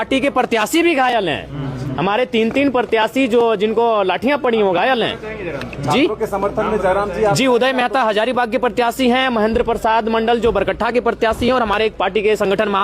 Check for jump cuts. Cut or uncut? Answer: uncut